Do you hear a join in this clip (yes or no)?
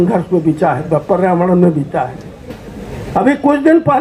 no